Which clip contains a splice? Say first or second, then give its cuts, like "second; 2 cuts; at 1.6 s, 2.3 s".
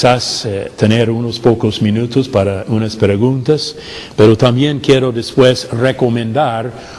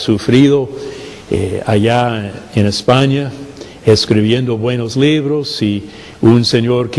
first; 1 cut; at 6.1 s